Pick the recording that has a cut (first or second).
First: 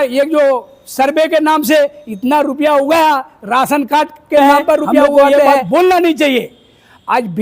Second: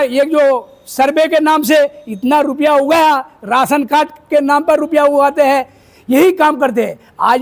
first